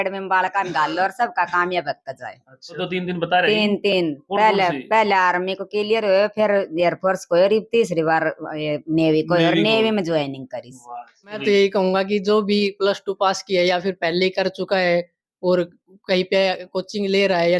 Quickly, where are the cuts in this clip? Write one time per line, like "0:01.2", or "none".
0:02.8
0:11.4